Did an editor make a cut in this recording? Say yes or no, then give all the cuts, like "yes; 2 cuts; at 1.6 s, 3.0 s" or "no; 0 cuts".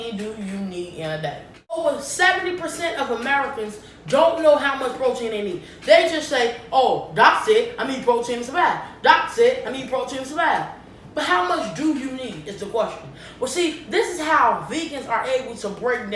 yes; 1 cut; at 1.8 s